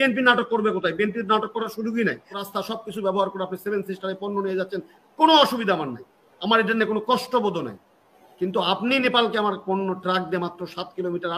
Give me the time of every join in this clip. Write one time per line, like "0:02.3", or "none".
0:02.4